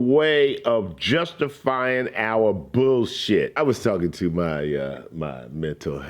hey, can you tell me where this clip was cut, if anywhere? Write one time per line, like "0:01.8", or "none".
0:03.6